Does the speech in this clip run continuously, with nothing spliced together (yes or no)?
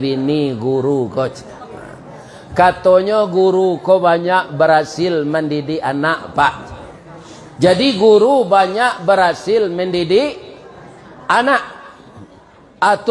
yes